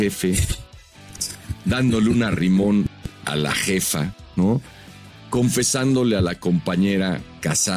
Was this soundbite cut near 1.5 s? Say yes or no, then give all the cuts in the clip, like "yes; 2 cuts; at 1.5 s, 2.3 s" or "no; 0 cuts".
no; 0 cuts